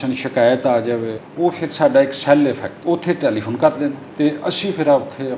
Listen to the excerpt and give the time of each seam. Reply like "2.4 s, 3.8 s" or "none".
1.2 s, 2.7 s, 4.0 s